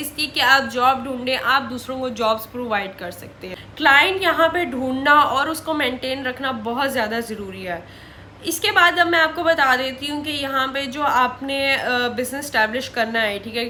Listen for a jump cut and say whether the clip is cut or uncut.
uncut